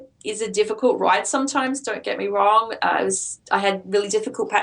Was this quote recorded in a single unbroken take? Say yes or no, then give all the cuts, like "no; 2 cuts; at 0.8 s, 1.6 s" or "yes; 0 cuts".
yes; 0 cuts